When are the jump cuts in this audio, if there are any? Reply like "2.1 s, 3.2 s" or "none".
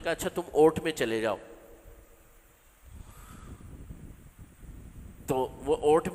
none